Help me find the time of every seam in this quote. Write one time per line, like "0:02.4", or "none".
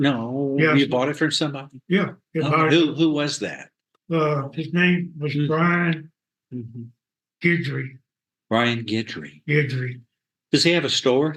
none